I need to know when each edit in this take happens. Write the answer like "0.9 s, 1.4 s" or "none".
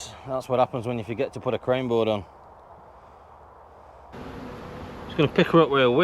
4.1 s